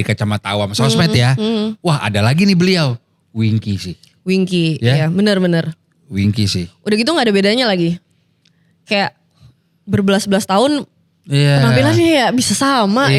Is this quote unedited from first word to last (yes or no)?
yes